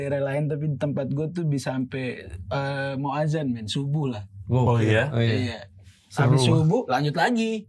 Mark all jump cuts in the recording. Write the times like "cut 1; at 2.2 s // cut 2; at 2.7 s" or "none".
none